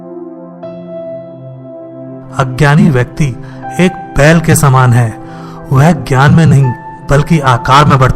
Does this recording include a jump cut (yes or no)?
yes